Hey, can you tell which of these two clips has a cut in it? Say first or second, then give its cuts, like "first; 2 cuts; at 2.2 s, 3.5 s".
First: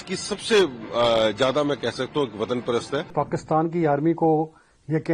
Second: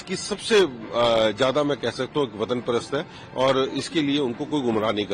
first; 1 cut; at 3.1 s